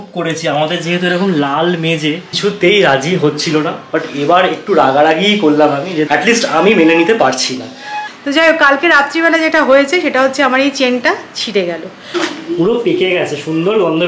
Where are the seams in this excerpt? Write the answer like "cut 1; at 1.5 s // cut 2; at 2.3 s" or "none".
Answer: cut 1; at 2.3 s // cut 2; at 6.0 s // cut 3; at 8.0 s // cut 4; at 12.0 s